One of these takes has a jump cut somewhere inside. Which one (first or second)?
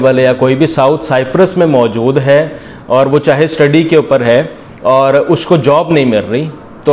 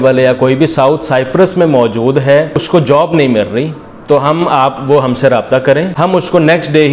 second